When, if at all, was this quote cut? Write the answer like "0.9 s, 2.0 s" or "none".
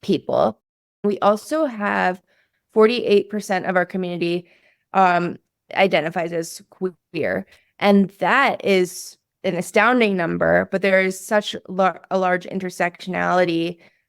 1.0 s

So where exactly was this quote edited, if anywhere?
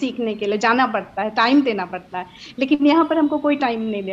none

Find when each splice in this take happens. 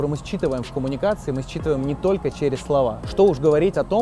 3.0 s

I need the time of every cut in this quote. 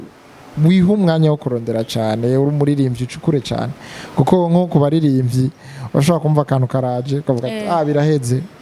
none

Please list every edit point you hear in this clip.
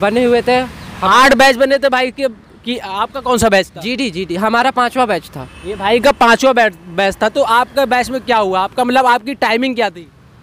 none

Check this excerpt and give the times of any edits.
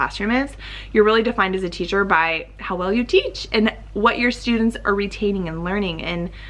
none

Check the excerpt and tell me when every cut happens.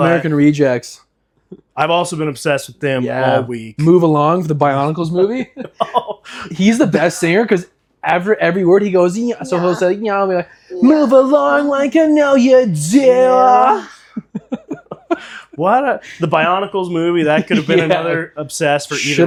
none

